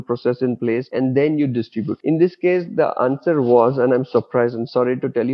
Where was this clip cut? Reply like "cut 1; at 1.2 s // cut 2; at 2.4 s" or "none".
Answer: cut 1; at 0.9 s // cut 2; at 1.9 s